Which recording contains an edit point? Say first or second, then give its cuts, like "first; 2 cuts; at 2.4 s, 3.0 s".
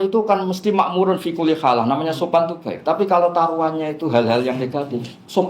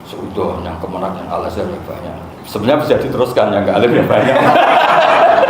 second; 1 cut; at 2.3 s